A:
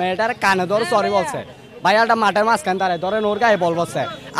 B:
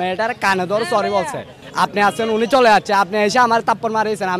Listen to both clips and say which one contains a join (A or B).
B